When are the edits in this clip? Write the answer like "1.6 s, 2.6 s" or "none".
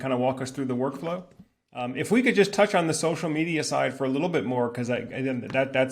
1.9 s